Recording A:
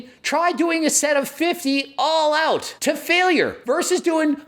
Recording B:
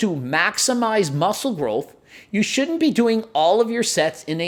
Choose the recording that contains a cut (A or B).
A